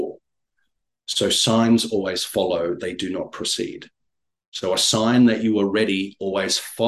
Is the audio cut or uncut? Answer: uncut